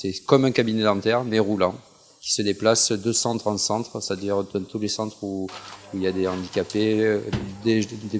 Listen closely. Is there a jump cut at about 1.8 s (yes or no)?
yes